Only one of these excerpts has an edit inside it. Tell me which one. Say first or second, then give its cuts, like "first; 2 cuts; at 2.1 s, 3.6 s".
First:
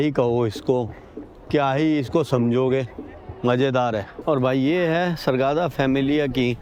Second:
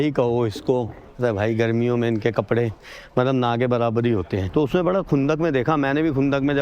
second; 2 cuts; at 1.0 s, 4.4 s